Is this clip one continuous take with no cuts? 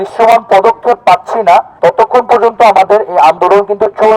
no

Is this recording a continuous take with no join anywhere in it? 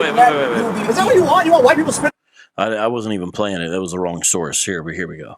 yes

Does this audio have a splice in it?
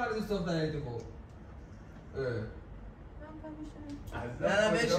no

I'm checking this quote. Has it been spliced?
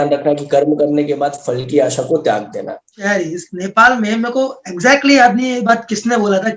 yes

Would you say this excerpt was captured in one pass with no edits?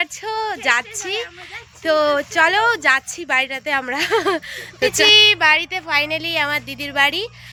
yes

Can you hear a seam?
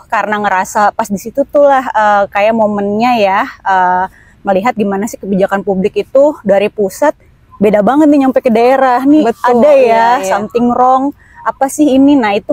no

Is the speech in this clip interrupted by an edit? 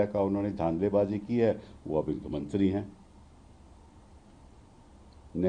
no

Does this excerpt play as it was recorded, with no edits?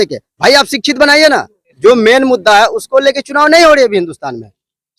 no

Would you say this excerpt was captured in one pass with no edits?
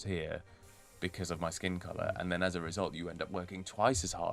yes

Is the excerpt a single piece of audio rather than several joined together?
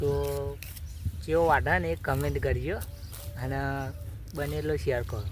yes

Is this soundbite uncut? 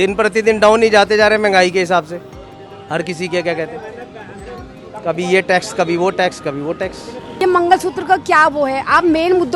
no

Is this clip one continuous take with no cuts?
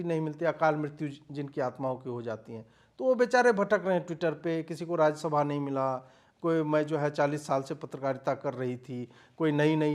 yes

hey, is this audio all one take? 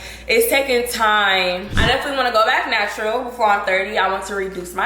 no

